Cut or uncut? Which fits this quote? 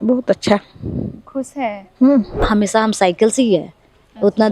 cut